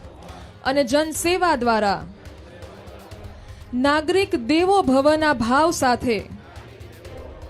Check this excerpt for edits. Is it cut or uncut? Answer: uncut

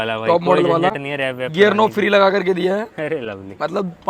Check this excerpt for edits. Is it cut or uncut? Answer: uncut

